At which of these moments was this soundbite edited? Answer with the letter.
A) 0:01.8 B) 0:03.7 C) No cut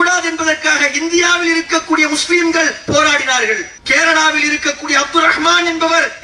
B